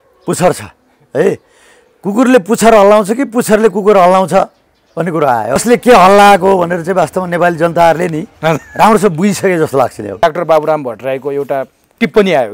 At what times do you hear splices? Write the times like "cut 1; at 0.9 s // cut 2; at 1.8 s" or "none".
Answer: cut 1; at 5.6 s // cut 2; at 10.2 s